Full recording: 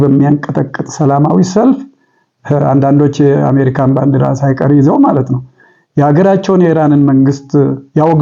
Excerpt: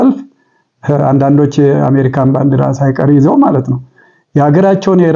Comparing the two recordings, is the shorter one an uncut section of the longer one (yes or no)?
yes